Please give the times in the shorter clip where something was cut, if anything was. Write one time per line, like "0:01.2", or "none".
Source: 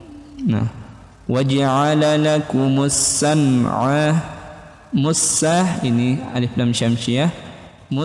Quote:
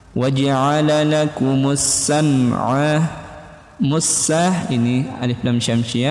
none

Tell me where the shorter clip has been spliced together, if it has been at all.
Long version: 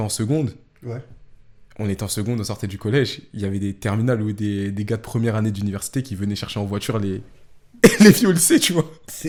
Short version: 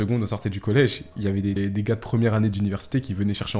0:01.6

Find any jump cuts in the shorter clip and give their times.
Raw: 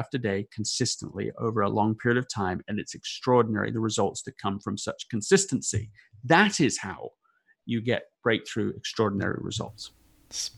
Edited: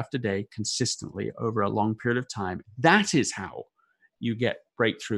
0:02.6

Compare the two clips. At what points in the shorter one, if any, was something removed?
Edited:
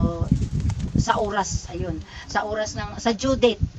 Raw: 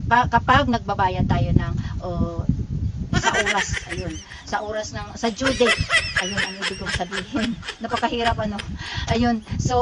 none

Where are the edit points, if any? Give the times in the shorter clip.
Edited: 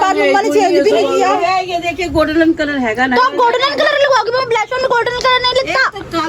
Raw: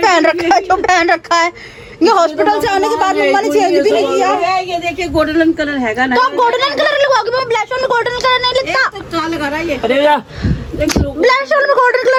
none

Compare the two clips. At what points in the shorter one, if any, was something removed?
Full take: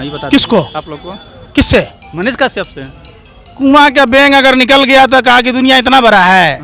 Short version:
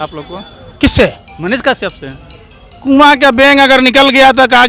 none

